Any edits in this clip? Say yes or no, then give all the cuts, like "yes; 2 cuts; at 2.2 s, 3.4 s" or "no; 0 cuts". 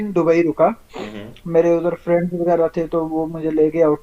no; 0 cuts